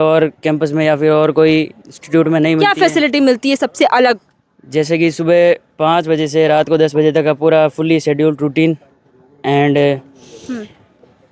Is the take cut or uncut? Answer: uncut